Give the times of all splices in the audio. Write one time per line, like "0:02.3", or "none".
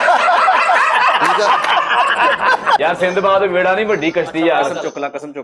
0:02.8